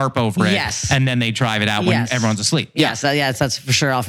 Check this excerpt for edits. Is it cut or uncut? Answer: uncut